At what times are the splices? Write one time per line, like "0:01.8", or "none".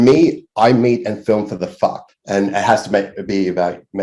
0:02.1